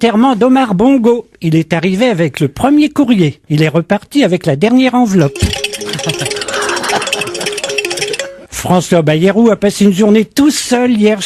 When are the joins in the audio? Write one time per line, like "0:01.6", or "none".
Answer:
0:01.8

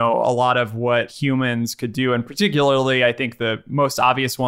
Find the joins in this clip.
0:01.1

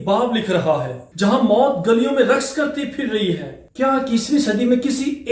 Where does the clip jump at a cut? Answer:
0:01.0
0:03.6

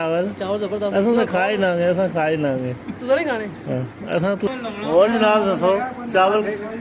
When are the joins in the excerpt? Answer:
0:04.5

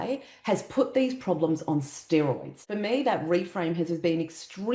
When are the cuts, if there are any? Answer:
0:02.6

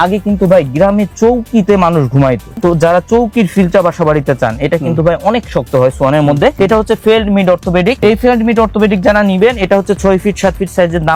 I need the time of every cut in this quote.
none

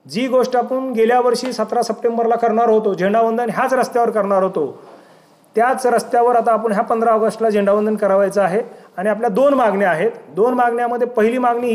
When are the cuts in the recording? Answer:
none

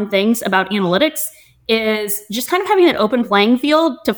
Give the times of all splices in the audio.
none

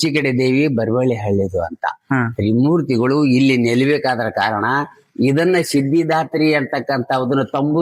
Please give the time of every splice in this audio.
none

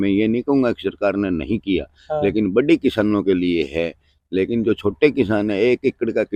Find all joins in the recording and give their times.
none

